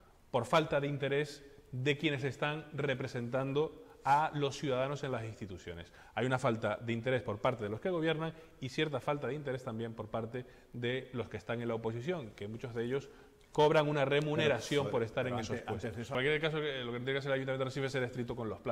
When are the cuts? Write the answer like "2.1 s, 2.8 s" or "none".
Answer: 16.1 s